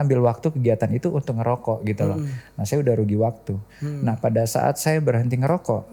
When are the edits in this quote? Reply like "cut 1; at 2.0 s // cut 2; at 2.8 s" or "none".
none